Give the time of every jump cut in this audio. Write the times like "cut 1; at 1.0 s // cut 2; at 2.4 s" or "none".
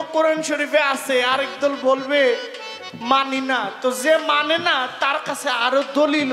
none

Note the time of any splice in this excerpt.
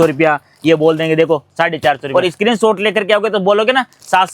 cut 1; at 2.0 s

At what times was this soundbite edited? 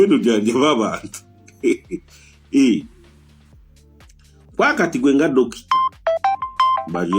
none

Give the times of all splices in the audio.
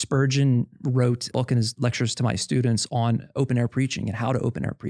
cut 1; at 1.3 s // cut 2; at 3.3 s

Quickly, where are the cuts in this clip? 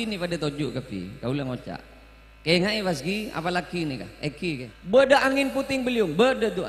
cut 1; at 4.7 s

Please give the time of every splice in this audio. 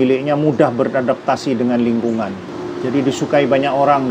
cut 1; at 2.5 s

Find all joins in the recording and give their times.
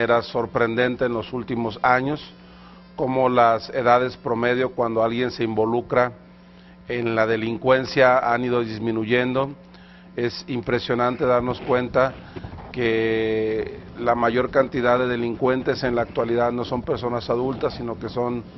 cut 1; at 12.7 s

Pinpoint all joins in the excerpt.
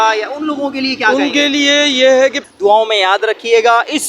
cut 1; at 2.4 s

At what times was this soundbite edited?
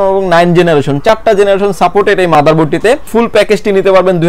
cut 1; at 3.1 s

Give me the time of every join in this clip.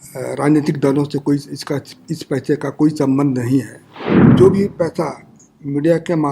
cut 1; at 4.2 s

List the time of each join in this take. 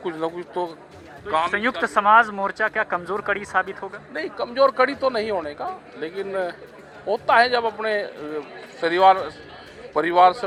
none

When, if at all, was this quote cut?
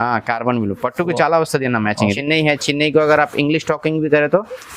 cut 1; at 2.2 s

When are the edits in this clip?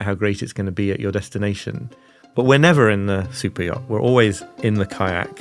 cut 1; at 4.5 s

